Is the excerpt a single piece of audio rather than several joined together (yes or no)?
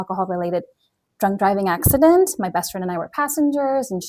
yes